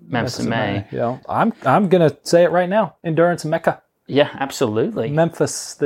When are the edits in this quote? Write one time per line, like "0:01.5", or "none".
0:01.2